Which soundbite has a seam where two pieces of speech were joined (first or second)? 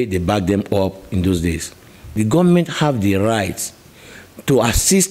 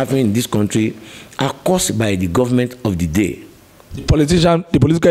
first